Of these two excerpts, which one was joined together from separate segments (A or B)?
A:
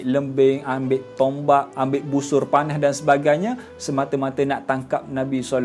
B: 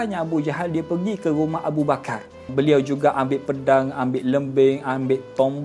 B